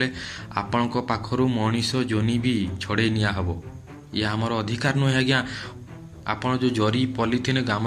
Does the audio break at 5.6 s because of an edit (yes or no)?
yes